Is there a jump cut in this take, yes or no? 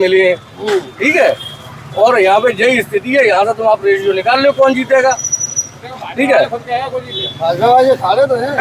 no